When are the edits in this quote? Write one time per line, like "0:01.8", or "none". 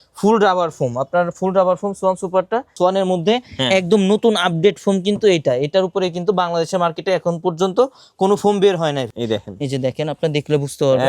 0:02.7
0:09.1